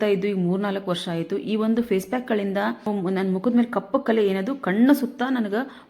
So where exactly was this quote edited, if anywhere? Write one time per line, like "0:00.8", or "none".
0:02.9